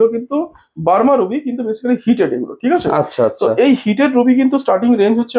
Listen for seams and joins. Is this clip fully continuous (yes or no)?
yes